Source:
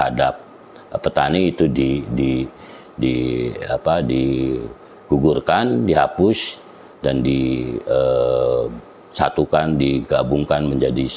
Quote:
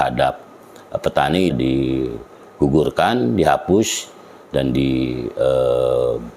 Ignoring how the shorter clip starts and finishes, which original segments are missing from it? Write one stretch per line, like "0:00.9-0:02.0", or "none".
0:01.5-0:04.0